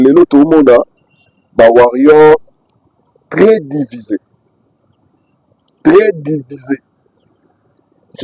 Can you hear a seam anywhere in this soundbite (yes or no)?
no